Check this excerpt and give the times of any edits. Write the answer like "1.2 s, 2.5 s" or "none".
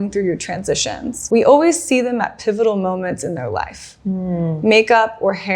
1.1 s